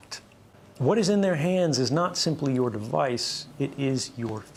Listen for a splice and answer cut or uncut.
uncut